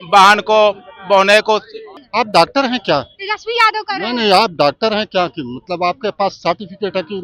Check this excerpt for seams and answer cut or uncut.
cut